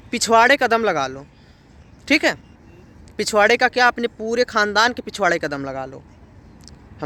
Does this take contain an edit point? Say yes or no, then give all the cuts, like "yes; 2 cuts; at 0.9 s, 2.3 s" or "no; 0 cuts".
no; 0 cuts